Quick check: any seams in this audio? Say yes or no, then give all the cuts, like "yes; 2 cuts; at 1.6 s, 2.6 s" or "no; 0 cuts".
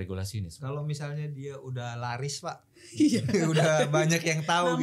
no; 0 cuts